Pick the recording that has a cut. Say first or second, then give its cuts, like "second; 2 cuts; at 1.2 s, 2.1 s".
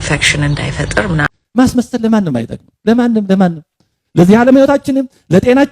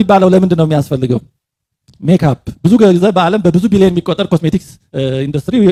first; 1 cut; at 1.3 s